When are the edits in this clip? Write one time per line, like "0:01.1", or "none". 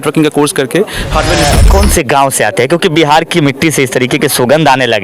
0:01.5